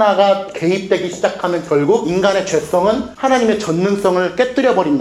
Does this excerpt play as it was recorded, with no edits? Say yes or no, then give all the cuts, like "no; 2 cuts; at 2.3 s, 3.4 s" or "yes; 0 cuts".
no; 1 cut; at 2.1 s